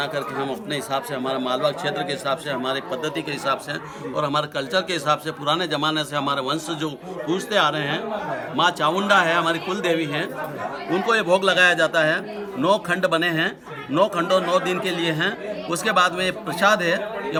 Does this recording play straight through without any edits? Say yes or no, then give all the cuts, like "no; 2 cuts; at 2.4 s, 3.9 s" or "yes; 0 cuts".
yes; 0 cuts